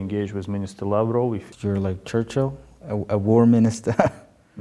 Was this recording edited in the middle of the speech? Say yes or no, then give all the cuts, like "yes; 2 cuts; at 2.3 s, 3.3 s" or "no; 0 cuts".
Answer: yes; 1 cut; at 1.5 s